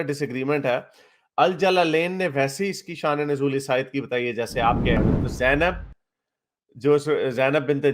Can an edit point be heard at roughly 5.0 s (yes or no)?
yes